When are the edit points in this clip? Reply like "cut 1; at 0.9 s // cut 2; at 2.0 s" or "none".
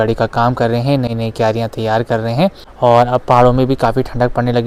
none

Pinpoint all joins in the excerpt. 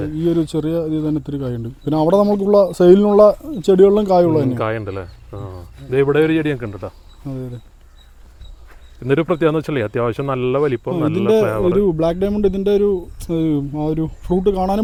none

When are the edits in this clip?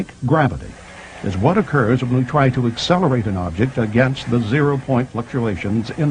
cut 1; at 1.3 s

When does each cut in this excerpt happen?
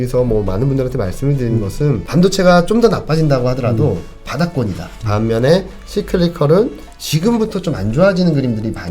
cut 1; at 2.0 s // cut 2; at 4.9 s

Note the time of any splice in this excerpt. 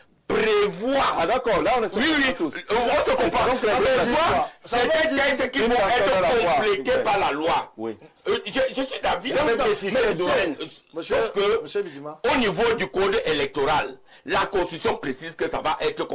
none

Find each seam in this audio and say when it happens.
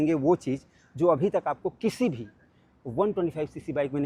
none

